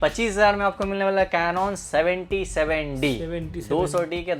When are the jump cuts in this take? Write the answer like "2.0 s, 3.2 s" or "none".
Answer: none

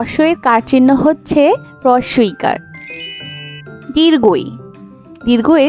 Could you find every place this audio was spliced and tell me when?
none

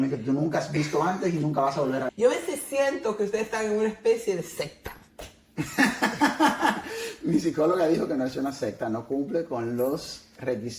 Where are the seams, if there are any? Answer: 2.1 s

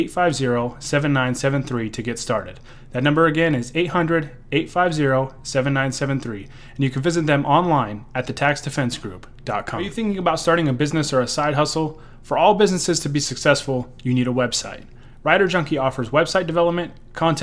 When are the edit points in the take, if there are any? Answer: 9.9 s

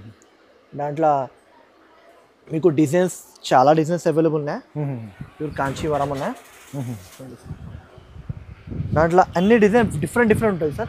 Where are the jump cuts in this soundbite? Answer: none

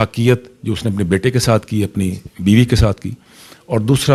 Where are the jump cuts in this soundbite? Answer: none

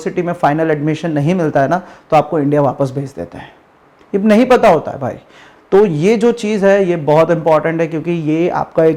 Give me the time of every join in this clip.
none

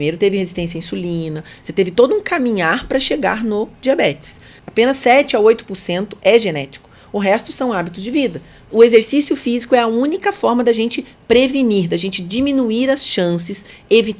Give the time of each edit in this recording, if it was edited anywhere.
4.6 s, 8.6 s

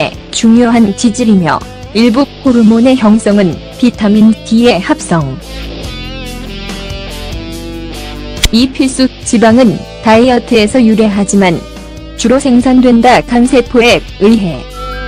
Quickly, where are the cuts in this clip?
6.2 s

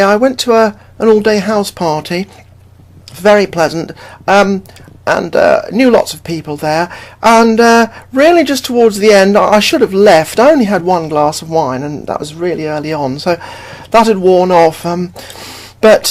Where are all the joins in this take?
7.4 s

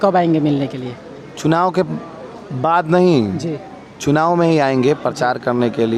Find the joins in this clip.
none

